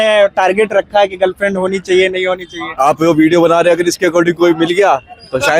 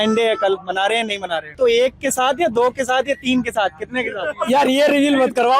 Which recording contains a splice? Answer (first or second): second